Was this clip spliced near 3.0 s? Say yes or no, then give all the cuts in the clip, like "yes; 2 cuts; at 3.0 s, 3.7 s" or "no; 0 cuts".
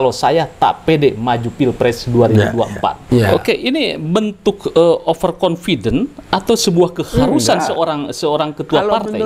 yes; 1 cut; at 3.0 s